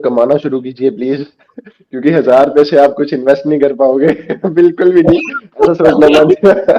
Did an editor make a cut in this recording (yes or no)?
no